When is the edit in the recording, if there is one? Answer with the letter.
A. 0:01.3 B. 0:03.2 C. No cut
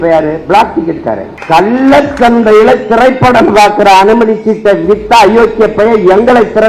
A